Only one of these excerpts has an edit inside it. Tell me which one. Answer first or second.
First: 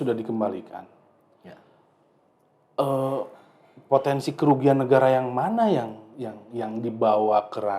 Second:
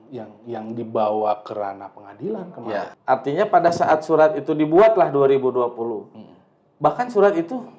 second